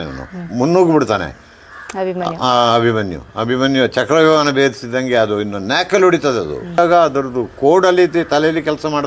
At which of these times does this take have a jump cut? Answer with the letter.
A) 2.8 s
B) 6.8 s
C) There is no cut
B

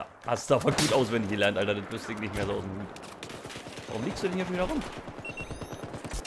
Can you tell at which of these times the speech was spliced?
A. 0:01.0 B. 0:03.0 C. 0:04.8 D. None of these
C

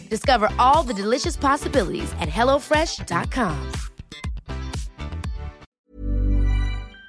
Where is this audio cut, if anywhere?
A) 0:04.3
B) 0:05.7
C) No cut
B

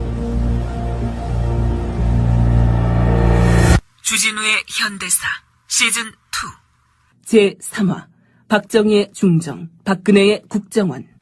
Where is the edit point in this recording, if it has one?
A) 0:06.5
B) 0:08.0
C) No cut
A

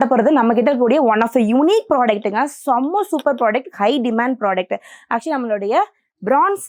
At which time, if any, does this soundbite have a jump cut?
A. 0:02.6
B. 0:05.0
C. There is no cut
C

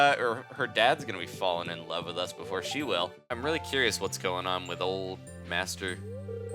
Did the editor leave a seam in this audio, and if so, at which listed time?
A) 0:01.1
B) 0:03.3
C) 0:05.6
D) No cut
B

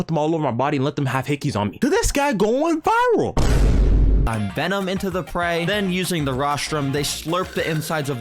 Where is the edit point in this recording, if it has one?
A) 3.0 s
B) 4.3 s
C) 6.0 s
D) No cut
B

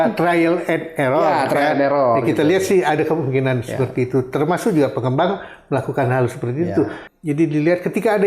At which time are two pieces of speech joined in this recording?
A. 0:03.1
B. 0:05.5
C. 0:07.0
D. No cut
C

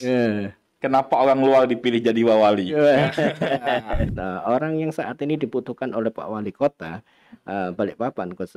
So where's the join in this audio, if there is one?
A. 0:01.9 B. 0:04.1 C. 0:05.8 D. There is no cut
B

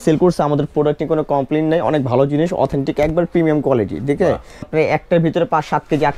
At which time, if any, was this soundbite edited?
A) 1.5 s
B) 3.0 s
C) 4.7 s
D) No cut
C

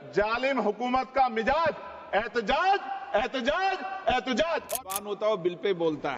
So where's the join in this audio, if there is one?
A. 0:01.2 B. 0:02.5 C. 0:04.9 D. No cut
C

